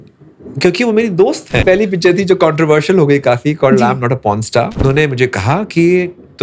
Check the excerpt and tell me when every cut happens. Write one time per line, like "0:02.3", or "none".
0:01.6
0:04.8